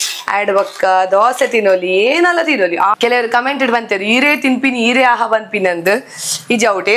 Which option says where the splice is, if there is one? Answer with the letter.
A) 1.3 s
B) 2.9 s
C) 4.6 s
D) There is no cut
B